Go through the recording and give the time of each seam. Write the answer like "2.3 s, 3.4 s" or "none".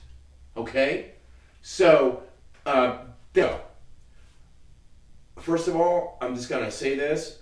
3.4 s